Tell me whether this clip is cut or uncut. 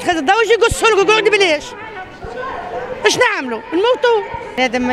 uncut